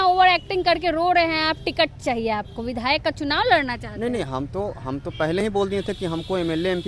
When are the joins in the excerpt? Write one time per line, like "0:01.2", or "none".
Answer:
none